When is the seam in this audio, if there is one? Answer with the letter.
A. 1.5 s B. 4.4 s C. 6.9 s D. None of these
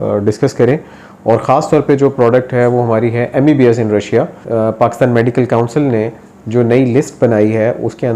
B